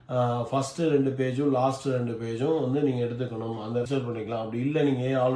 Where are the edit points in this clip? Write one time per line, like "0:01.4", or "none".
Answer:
0:03.8